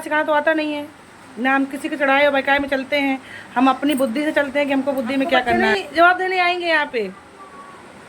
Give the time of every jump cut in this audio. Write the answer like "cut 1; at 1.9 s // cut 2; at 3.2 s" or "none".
cut 1; at 5.6 s

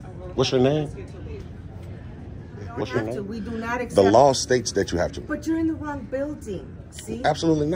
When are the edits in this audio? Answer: cut 1; at 3.0 s

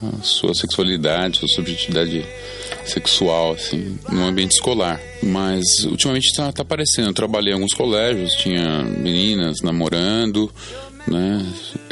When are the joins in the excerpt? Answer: cut 1; at 5.1 s

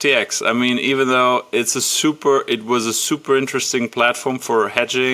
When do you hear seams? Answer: none

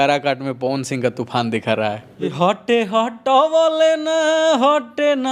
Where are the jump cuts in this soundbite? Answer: cut 1; at 2.3 s

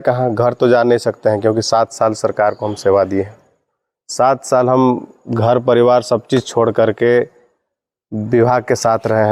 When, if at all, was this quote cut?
none

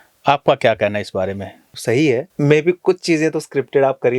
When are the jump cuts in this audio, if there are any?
cut 1; at 1.7 s // cut 2; at 2.3 s

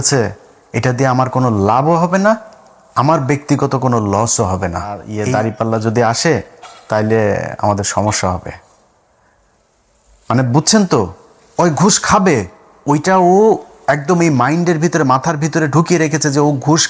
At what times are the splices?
cut 1; at 5.1 s

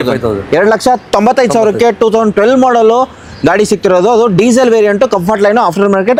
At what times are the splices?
none

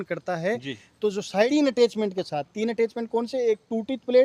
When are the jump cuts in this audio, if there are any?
cut 1; at 1.5 s

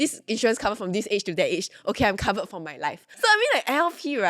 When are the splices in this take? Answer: cut 1; at 3.1 s

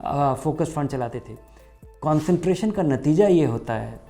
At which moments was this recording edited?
cut 1; at 1.8 s

